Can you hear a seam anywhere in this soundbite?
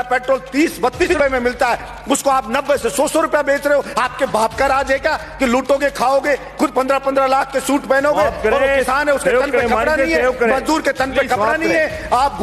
yes; 1 cut; at 1.0 s

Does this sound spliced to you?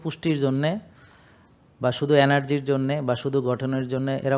no; 0 cuts

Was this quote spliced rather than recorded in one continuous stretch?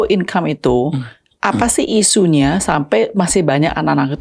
no; 0 cuts

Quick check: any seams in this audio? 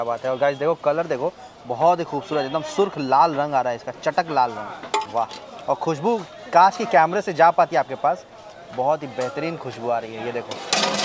yes; 1 cut; at 5.1 s

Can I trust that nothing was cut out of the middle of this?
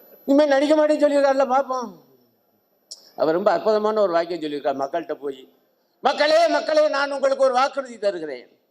yes; 0 cuts

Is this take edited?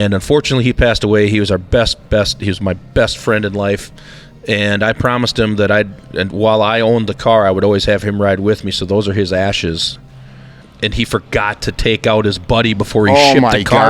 yes; 1 cut; at 10.6 s

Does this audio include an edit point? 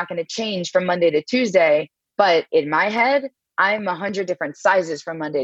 no; 0 cuts

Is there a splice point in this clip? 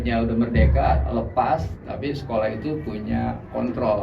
no; 0 cuts

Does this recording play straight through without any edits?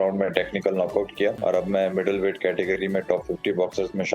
no; 1 cut; at 1.4 s

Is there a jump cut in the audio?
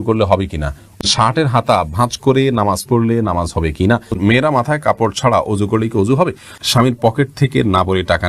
yes; 3 cuts; at 1.0 s, 4.2 s, 6.6 s

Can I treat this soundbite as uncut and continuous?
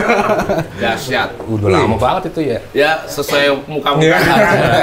no; 1 cut; at 2.6 s

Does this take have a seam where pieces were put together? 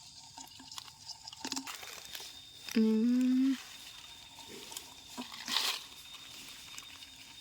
yes; 1 cut; at 1.7 s

